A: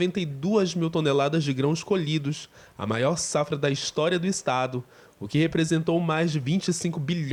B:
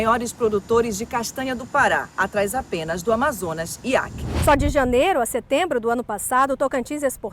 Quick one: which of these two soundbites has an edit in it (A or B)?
B